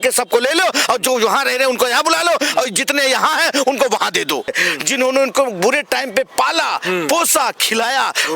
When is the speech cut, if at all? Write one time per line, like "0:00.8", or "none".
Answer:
0:04.5